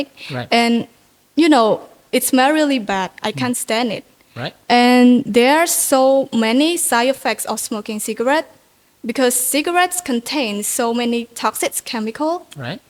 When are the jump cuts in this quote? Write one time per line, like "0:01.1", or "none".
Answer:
none